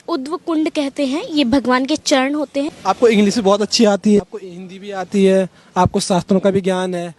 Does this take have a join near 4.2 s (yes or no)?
yes